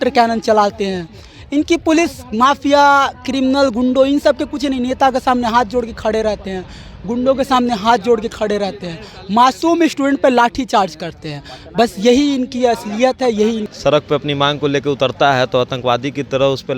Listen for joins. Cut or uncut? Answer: cut